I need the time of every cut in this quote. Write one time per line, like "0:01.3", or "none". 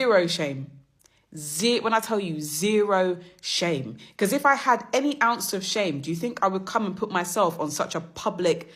none